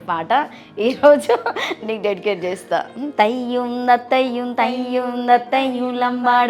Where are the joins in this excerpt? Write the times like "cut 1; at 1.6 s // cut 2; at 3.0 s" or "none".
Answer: cut 1; at 3.0 s